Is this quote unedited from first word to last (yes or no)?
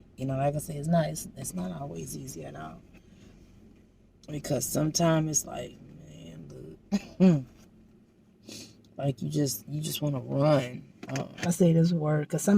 no